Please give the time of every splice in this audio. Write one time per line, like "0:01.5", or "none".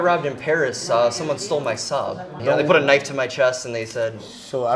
0:02.3